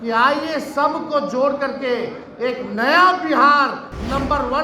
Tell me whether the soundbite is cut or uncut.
uncut